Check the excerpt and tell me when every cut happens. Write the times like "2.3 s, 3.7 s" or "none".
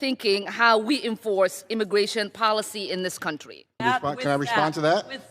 3.8 s